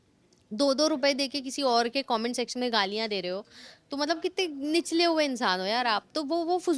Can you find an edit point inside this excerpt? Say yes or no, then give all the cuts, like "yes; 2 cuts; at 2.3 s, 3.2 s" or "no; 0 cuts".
no; 0 cuts